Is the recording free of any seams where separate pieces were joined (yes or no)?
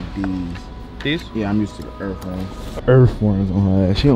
no